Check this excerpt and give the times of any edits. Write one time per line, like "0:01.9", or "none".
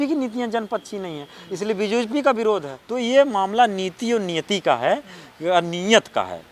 0:02.8